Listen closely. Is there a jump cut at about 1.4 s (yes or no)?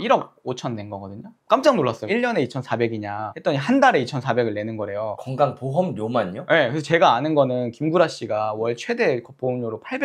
yes